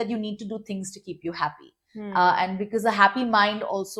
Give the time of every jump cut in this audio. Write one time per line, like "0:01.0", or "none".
none